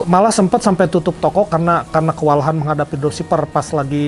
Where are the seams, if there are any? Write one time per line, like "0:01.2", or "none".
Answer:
none